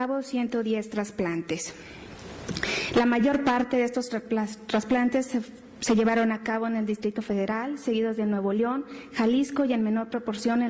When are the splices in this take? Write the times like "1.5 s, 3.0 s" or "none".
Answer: 5.4 s